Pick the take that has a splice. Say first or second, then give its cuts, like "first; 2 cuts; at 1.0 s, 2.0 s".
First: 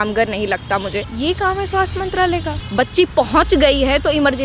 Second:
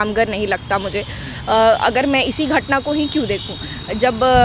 first; 2 cuts; at 1.1 s, 2.6 s